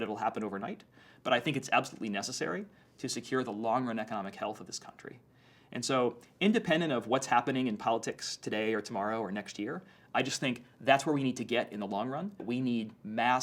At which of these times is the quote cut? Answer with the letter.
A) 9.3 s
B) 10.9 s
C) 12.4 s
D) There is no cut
C